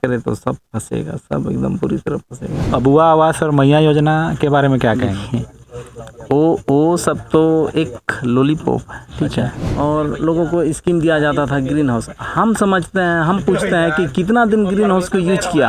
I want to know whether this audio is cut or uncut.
cut